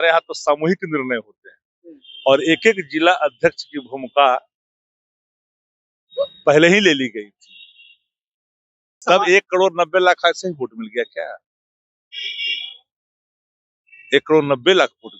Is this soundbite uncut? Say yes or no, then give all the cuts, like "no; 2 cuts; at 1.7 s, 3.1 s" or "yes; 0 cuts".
no; 1 cut; at 9.0 s